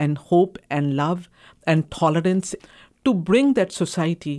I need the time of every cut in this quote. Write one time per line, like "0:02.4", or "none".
0:02.5